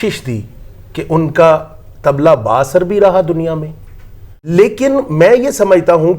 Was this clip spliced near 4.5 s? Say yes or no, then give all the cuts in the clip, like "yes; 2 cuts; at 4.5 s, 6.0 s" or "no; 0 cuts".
yes; 1 cut; at 4.5 s